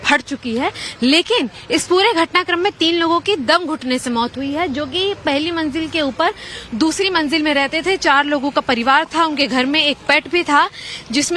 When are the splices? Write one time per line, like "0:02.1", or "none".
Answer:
0:08.8